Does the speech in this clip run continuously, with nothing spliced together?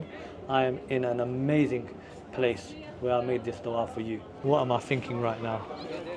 no; 1 cut; at 4.3 s

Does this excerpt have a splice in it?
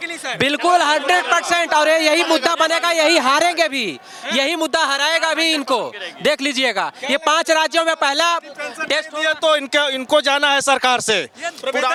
no; 0 cuts

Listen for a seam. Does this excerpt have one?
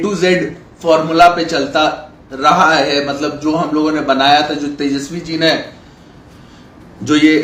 no; 0 cuts

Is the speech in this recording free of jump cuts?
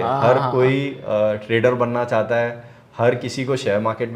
yes; 0 cuts

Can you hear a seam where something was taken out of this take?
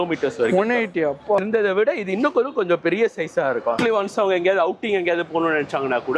yes; 2 cuts; at 1.8 s, 3.8 s

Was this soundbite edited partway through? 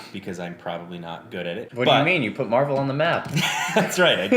yes; 1 cut; at 1.7 s

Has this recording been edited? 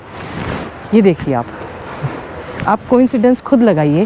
no; 0 cuts

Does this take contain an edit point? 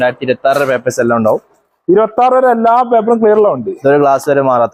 no; 0 cuts

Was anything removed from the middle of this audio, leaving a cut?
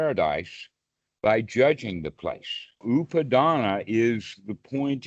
yes; 1 cut; at 2.8 s

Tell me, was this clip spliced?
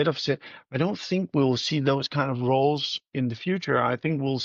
no; 0 cuts

